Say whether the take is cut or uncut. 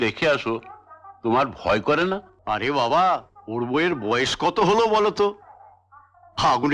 cut